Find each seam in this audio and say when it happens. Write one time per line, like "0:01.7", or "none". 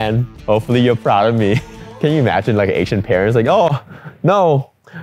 0:01.8